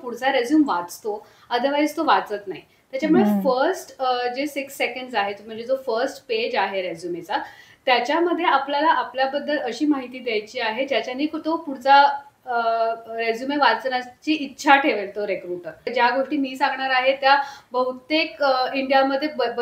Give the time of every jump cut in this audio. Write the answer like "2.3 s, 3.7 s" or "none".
15.9 s